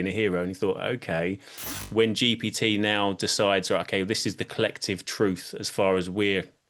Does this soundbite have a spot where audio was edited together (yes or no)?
yes